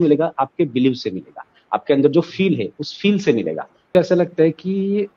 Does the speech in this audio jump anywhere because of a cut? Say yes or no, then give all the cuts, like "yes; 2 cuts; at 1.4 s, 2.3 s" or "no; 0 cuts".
yes; 1 cut; at 3.9 s